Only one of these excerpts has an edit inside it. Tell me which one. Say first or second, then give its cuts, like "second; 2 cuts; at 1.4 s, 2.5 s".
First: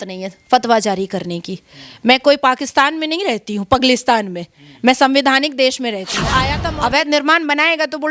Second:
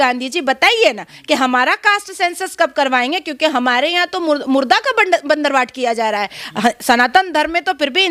first; 1 cut; at 6.6 s